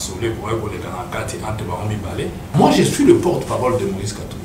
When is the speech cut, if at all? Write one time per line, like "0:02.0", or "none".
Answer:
0:02.5